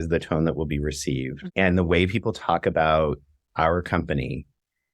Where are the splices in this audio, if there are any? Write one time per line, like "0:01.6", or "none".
0:01.3